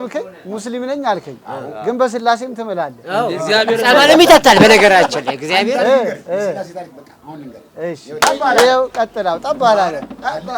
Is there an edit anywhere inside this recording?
yes; 1 cut; at 8.1 s

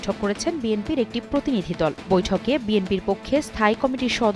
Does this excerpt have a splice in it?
no; 0 cuts

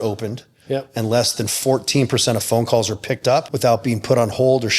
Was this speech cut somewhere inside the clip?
yes; 1 cut; at 3.5 s

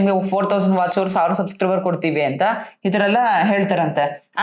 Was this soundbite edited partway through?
no; 0 cuts

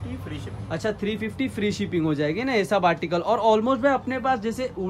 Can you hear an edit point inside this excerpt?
no; 0 cuts

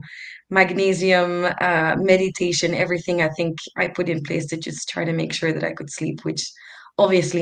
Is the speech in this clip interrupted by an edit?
no; 0 cuts

